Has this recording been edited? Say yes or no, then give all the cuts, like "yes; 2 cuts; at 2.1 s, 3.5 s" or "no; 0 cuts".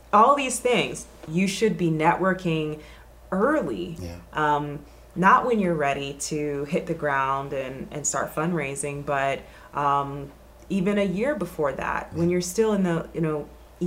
yes; 1 cut; at 1.2 s